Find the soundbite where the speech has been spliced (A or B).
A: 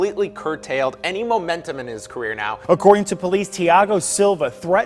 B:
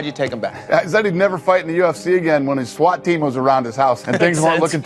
A